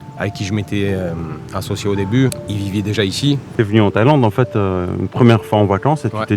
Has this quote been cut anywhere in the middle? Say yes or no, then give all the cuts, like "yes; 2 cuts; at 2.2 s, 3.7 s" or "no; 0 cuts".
yes; 2 cuts; at 2.4 s, 3.5 s